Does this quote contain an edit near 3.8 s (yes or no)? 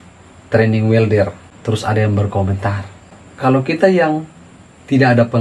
no